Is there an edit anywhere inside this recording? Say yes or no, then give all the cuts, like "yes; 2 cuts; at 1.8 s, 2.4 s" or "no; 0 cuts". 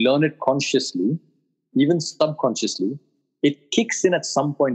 no; 0 cuts